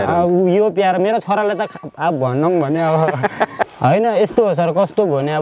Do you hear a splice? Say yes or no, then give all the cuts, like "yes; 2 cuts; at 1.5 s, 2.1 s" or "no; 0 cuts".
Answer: yes; 1 cut; at 3.6 s